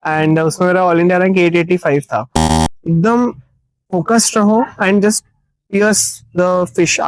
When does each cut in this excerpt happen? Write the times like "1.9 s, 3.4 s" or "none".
2.4 s